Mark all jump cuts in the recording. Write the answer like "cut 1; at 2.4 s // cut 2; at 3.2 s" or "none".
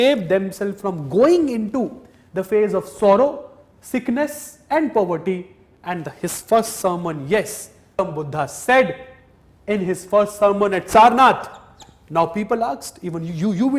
cut 1; at 8.0 s